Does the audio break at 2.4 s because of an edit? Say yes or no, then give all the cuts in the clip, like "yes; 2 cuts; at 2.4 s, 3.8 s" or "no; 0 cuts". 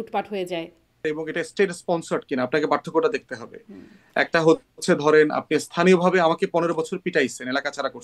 no; 1 cut; at 1.2 s